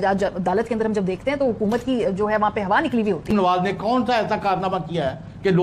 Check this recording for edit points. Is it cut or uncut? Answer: cut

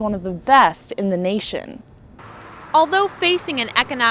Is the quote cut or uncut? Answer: cut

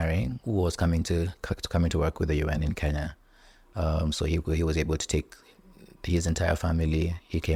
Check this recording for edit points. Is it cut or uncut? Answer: uncut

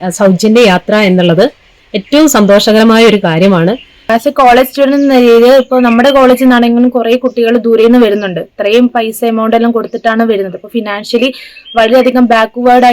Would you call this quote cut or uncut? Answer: cut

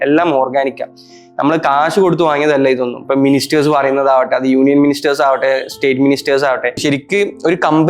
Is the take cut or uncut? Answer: cut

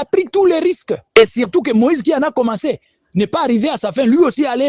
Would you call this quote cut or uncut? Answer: uncut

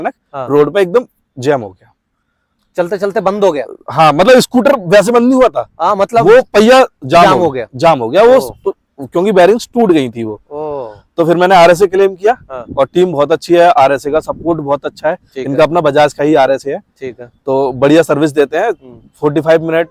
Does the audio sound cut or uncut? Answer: uncut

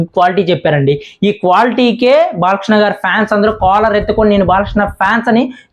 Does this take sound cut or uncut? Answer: uncut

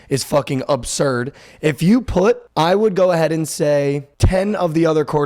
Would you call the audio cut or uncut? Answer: cut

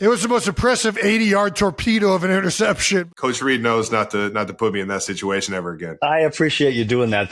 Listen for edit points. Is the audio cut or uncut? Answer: cut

